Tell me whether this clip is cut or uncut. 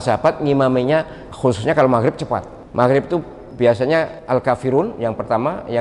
cut